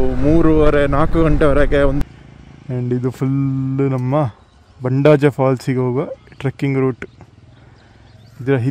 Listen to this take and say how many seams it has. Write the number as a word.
one